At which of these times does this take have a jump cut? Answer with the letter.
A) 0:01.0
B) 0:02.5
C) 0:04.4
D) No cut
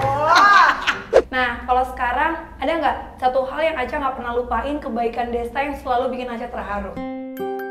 A